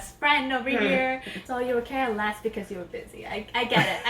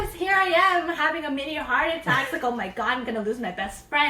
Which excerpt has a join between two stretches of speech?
first; 1 cut; at 1.3 s

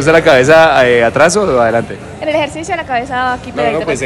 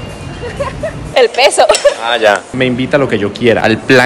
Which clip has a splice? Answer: second; 2 cuts; at 1.0 s, 2.6 s

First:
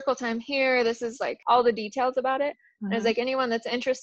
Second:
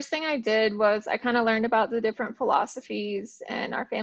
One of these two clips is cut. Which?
first; 1 cut; at 1.3 s

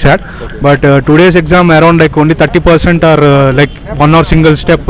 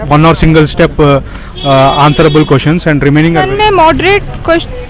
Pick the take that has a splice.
second; 1 cut; at 3.4 s

